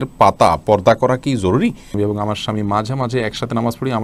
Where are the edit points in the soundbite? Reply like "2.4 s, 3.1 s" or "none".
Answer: 1.9 s